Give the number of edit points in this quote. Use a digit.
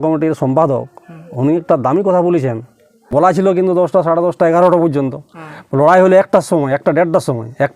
1